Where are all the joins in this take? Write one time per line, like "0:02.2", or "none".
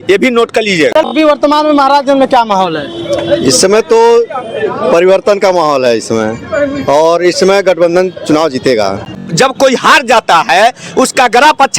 0:00.9
0:09.2